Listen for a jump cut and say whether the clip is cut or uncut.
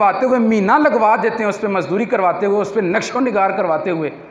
uncut